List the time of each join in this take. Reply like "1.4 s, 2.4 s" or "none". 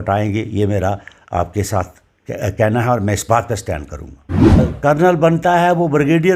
4.6 s